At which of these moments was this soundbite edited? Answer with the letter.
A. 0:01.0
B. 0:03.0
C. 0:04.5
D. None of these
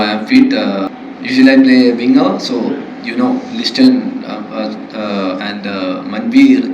A